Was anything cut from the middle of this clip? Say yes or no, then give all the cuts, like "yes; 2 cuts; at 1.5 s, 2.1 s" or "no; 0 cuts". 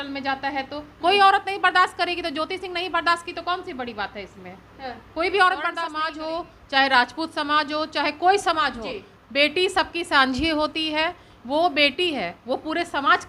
yes; 1 cut; at 6.0 s